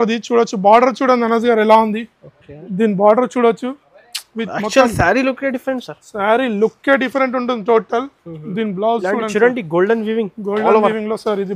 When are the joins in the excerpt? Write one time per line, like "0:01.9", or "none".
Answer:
none